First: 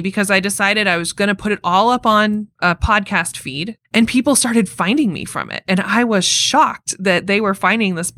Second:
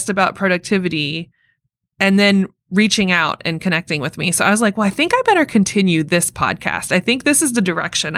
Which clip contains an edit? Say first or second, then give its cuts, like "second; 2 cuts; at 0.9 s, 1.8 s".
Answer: first; 2 cuts; at 2.5 s, 3.7 s